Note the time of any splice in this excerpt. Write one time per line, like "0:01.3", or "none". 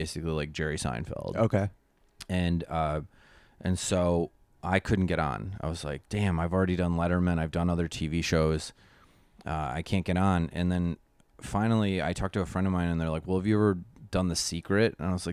none